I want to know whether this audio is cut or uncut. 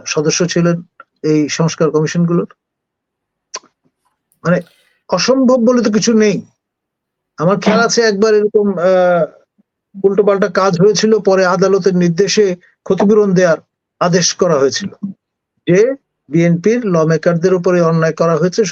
uncut